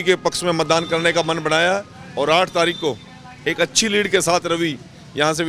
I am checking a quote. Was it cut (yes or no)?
no